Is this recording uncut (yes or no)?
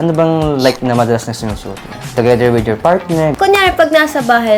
no